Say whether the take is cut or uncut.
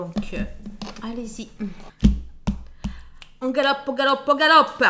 cut